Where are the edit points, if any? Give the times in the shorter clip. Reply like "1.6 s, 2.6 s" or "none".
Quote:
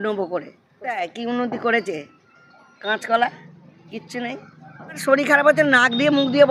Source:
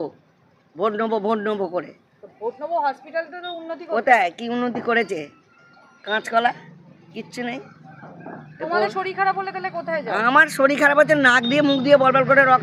0.9 s, 5.0 s